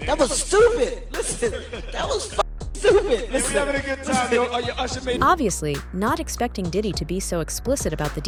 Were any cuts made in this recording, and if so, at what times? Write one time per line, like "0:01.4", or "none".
none